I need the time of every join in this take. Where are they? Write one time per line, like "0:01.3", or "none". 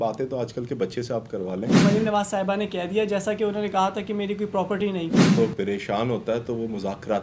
0:01.8
0:05.2